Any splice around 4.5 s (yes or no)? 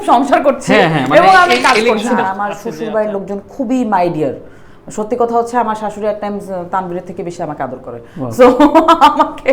no